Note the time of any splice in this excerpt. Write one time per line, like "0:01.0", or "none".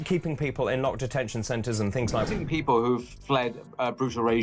0:02.3